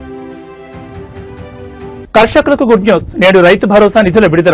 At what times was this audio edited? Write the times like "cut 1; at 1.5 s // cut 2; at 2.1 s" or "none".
cut 1; at 2.0 s